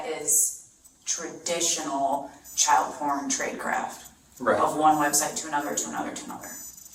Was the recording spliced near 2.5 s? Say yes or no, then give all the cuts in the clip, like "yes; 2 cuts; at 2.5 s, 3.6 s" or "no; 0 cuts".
no; 0 cuts